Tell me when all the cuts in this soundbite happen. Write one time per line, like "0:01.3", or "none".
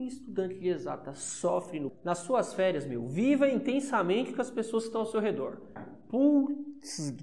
0:01.9
0:05.8